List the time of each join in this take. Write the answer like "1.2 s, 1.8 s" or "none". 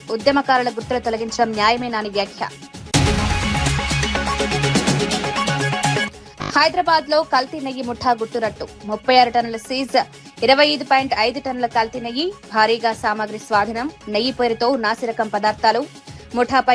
none